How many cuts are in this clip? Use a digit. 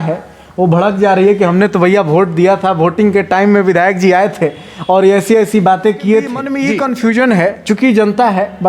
1